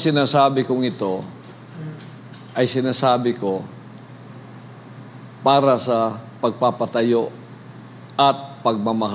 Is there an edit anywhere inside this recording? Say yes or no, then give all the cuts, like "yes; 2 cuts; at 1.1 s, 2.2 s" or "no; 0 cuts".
no; 0 cuts